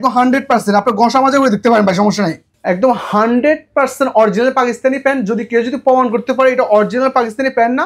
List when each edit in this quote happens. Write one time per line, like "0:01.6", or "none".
0:02.5